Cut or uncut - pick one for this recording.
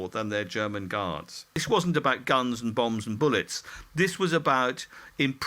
cut